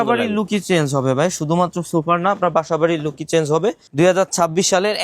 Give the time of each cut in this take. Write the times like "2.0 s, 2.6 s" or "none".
3.8 s